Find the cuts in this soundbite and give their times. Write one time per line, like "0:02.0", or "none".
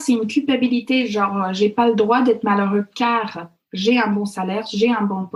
none